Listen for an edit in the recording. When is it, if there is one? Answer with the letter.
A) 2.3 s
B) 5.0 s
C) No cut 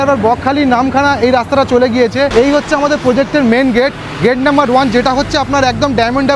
A